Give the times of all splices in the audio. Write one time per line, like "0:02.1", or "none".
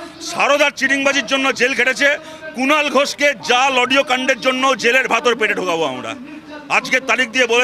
none